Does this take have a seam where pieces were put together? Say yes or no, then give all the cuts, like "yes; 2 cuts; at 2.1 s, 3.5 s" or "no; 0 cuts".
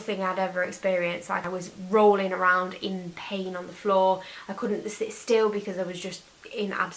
yes; 1 cut; at 1.4 s